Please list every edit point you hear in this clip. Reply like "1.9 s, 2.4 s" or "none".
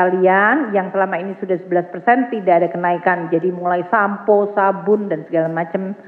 none